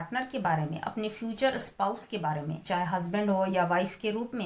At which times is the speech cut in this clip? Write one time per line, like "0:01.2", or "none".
0:02.6